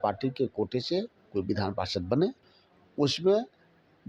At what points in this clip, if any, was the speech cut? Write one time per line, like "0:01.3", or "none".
0:02.4